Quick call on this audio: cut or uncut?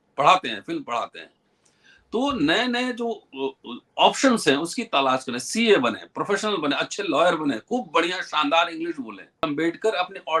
cut